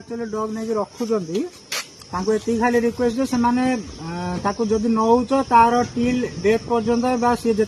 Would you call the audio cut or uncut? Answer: uncut